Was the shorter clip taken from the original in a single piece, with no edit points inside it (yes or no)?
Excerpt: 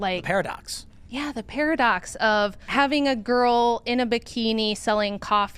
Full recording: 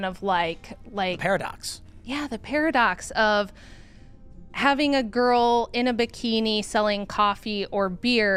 no